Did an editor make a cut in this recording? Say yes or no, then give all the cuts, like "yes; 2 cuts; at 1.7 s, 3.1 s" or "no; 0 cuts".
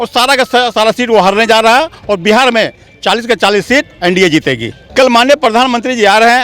yes; 1 cut; at 4.7 s